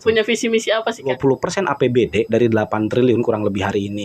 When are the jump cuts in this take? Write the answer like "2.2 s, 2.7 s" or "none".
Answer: 1.1 s